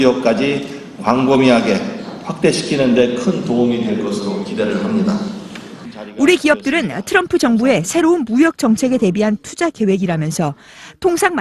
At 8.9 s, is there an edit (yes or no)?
yes